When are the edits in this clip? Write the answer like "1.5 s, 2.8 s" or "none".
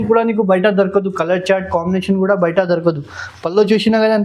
none

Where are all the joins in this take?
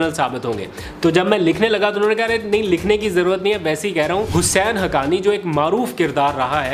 4.3 s

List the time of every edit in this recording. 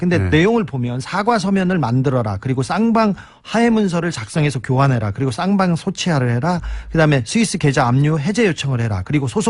4.8 s

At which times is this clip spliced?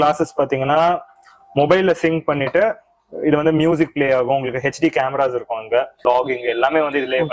6.0 s

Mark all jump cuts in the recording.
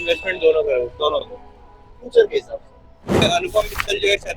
3.2 s

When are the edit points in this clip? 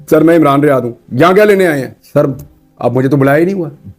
1.9 s

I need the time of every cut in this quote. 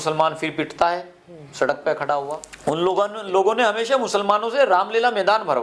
2.5 s

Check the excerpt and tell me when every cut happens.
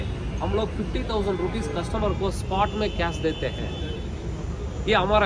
none

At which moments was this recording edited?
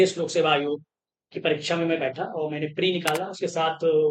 none

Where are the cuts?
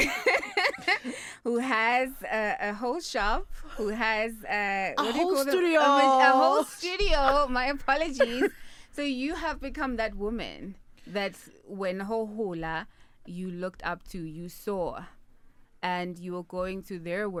none

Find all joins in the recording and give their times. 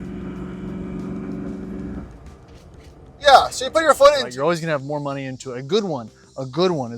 4.3 s

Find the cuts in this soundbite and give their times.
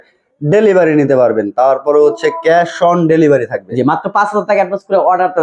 none

